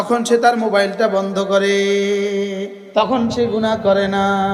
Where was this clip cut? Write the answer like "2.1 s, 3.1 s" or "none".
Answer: 2.8 s